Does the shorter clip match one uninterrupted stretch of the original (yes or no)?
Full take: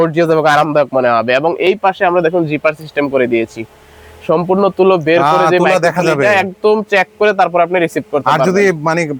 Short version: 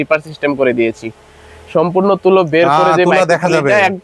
yes